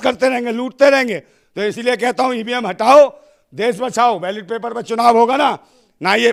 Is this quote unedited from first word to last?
yes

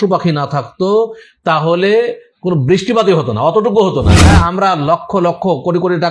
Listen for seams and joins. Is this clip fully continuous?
no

